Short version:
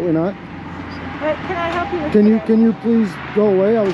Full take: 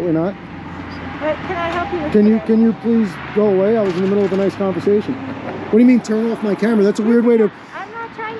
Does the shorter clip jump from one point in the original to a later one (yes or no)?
no